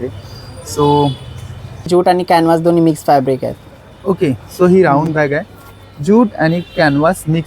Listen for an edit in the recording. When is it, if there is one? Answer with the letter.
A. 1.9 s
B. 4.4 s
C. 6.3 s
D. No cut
A